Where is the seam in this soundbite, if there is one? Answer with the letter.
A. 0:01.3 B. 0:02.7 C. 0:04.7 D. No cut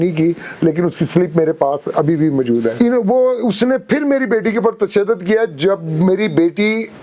B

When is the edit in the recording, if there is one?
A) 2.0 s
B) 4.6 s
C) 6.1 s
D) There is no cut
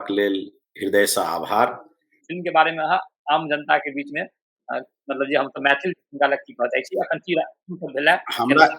A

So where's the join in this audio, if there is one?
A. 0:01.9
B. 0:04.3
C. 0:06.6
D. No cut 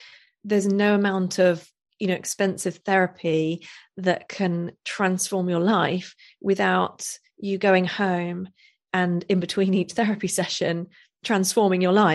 D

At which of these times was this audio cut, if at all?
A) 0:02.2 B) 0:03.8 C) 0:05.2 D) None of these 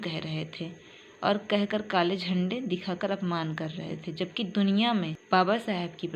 C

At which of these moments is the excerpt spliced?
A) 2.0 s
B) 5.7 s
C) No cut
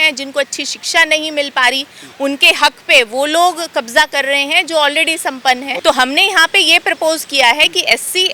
B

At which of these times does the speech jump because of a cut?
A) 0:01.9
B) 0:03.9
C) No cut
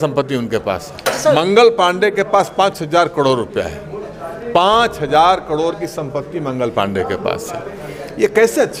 C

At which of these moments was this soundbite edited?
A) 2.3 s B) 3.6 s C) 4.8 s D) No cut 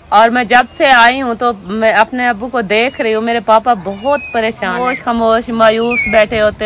C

